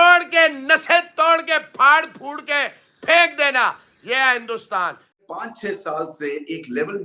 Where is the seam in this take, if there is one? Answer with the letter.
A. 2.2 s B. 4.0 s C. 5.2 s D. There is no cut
C